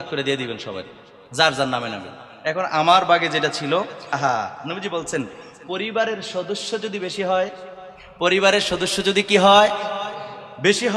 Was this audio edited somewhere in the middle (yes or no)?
yes